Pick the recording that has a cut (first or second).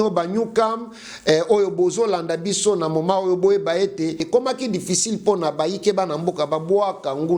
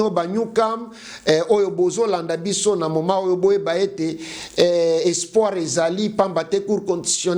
first